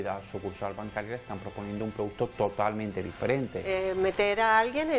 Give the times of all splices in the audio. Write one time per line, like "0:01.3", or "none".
0:03.7